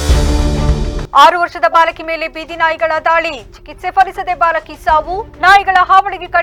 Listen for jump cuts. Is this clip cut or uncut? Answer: uncut